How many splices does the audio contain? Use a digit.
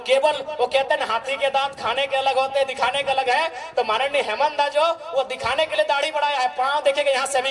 0